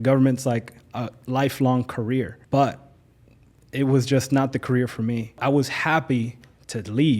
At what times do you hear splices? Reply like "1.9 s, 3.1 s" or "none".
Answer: 2.4 s, 5.4 s